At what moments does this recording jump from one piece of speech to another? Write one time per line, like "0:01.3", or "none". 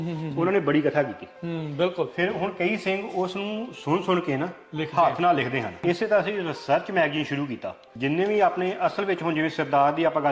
0:05.7
0:07.9